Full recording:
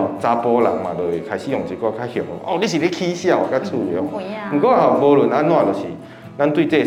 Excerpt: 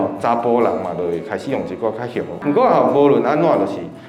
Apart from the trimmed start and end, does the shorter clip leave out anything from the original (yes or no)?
yes